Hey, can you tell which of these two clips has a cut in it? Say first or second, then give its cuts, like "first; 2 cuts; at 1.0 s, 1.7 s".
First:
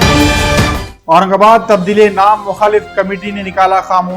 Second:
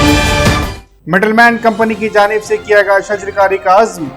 first; 1 cut; at 0.9 s